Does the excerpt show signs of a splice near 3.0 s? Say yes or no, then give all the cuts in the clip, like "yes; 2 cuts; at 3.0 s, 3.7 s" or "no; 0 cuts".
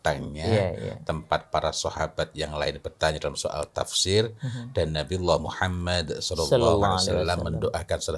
no; 0 cuts